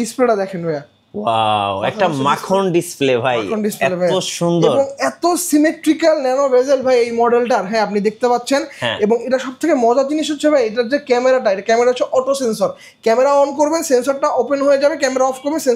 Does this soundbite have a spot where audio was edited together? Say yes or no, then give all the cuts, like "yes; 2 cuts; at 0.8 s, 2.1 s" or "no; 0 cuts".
no; 0 cuts